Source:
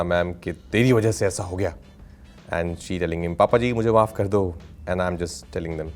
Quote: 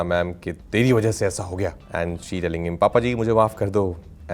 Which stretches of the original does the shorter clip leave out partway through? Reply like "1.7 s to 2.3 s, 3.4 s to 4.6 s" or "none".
1.8 s to 2.4 s